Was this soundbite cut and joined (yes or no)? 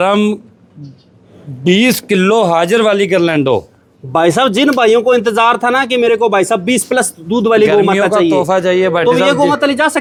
no